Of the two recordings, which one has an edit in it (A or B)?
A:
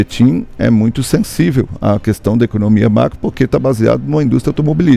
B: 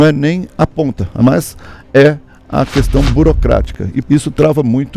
B